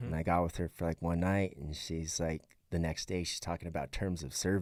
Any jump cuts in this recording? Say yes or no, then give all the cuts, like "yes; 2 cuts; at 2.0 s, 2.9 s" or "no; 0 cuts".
no; 0 cuts